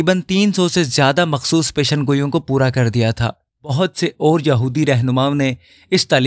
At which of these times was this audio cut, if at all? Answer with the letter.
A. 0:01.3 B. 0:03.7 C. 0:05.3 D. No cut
B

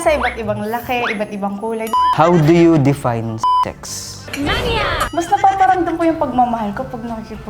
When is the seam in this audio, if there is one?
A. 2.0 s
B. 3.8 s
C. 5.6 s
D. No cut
A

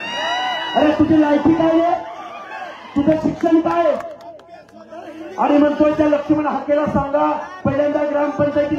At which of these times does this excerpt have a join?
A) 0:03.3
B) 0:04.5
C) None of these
C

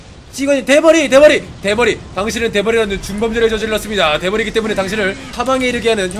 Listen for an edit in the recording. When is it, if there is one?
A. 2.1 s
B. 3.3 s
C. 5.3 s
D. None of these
C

